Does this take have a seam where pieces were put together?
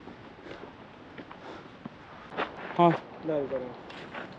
yes; 1 cut; at 2.6 s

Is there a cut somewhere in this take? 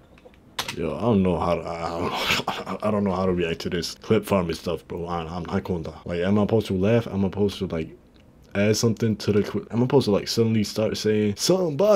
no; 0 cuts

